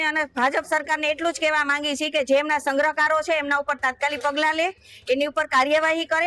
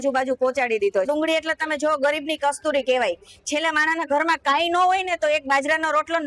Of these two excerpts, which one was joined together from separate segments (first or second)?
second